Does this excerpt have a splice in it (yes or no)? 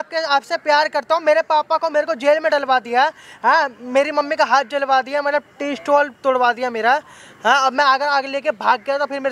no